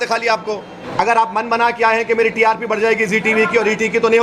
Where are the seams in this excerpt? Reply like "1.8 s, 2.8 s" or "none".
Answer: 0.9 s